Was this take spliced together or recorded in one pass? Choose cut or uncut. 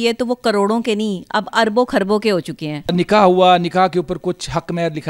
uncut